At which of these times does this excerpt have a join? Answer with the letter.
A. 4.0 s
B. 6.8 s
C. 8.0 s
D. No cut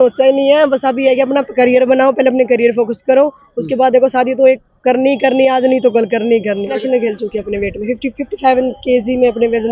B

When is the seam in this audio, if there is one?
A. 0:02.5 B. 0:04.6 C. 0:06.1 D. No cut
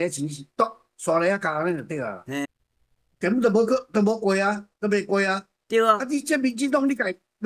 A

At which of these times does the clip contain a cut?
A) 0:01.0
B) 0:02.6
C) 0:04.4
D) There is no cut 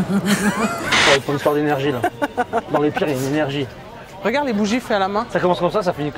A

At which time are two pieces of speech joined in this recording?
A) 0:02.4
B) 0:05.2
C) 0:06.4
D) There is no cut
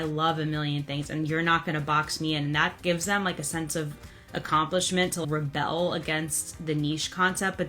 B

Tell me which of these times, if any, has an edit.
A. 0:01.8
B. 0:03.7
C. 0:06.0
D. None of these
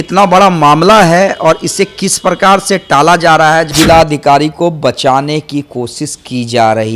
B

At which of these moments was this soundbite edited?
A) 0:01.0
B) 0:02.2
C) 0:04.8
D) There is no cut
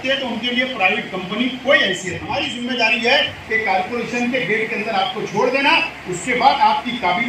B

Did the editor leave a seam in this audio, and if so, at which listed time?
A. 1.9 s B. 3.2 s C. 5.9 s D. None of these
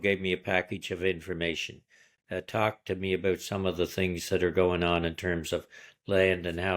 D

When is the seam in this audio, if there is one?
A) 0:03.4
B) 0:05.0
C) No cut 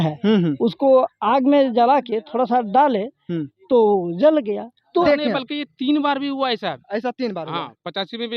B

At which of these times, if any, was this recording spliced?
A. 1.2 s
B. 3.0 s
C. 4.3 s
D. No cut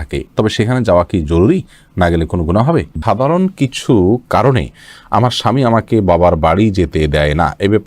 B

